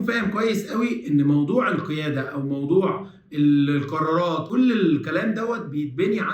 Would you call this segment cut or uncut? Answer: cut